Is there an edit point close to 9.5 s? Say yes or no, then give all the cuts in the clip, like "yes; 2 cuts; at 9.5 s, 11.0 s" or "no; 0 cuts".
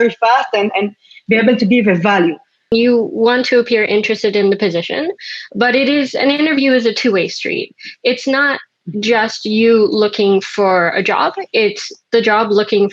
no; 1 cut; at 2.7 s